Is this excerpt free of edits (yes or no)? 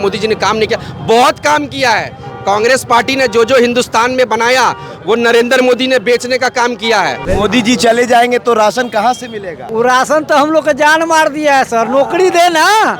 no